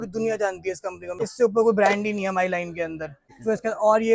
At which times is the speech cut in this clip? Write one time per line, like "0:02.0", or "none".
0:01.2
0:03.0